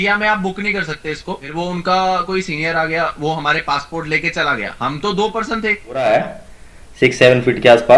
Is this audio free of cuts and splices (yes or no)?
no